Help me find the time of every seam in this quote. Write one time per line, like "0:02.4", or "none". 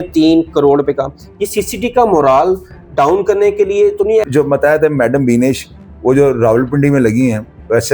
0:04.3